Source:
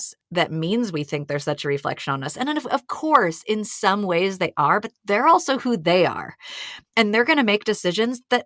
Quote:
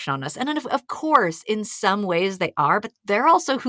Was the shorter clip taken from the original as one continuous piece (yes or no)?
yes